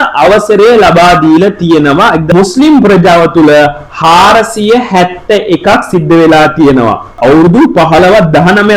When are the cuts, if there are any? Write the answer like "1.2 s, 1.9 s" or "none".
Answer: 2.2 s, 7.1 s